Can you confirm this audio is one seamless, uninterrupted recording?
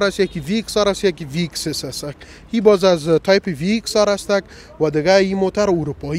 yes; 0 cuts

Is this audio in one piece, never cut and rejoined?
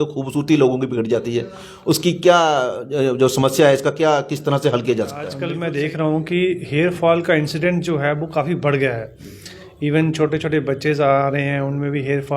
no; 1 cut; at 5.4 s

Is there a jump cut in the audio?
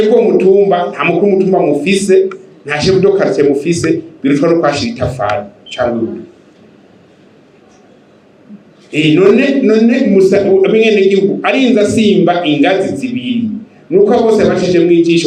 no; 0 cuts

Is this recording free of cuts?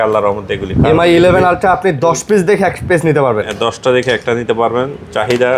yes; 0 cuts

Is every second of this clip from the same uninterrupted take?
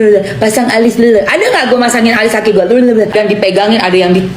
no; 1 cut; at 3.1 s

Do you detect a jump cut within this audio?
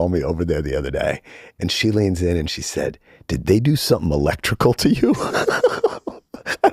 yes; 1 cut; at 1.4 s

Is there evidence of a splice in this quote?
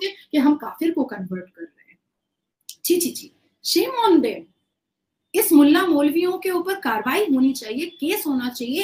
no; 0 cuts

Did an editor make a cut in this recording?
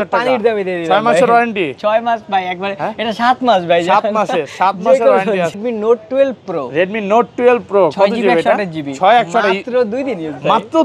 yes; 1 cut; at 5.6 s

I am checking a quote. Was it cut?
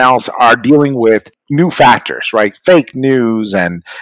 yes; 1 cut; at 1.4 s

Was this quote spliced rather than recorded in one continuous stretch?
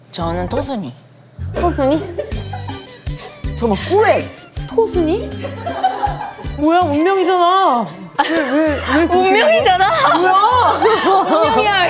no; 0 cuts

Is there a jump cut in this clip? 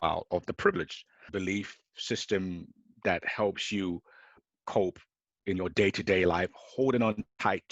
yes; 2 cuts; at 1.3 s, 4.5 s

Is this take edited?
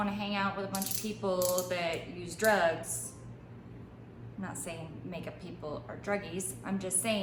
no; 0 cuts

